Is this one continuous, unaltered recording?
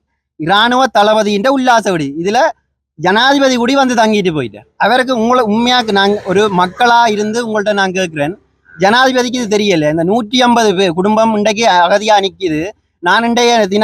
yes; 0 cuts

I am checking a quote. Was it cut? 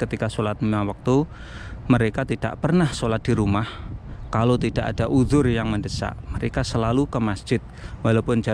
no; 0 cuts

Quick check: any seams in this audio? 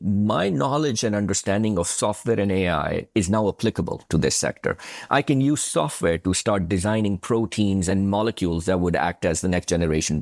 yes; 1 cut; at 7.9 s

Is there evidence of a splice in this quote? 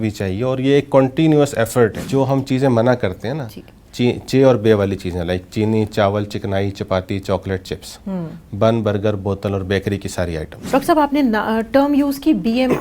yes; 2 cuts; at 2.0 s, 10.5 s

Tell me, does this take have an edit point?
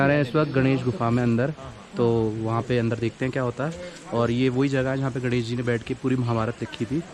no; 0 cuts

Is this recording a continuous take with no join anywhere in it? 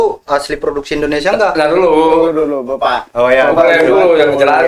yes; 0 cuts

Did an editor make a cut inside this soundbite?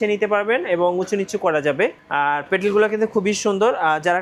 no; 0 cuts

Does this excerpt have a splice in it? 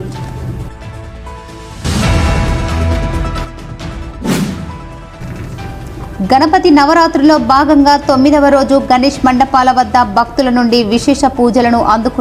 no; 0 cuts

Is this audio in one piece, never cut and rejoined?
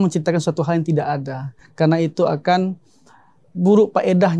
yes; 0 cuts

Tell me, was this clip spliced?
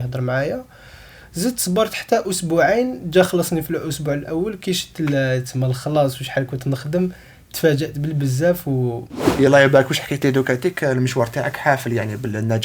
yes; 1 cut; at 9.3 s

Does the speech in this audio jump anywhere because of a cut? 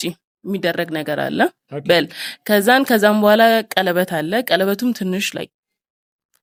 no; 0 cuts

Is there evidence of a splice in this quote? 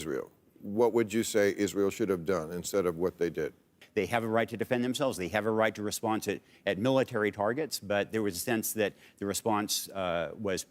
yes; 1 cut; at 3.8 s

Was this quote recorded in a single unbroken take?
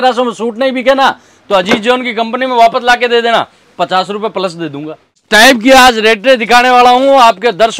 no; 1 cut; at 5.2 s

